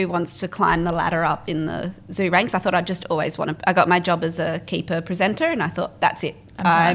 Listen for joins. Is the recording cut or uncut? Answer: uncut